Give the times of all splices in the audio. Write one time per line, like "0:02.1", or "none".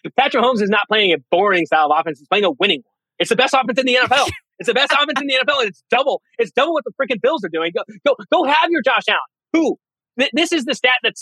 none